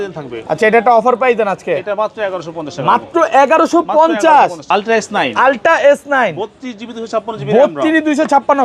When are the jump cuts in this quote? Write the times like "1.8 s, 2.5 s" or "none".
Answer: 4.6 s